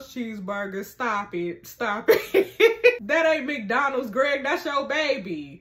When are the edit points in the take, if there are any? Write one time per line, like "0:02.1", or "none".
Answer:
0:03.0